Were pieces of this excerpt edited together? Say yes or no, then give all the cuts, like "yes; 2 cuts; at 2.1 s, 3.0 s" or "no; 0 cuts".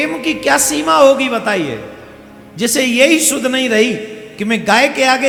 no; 0 cuts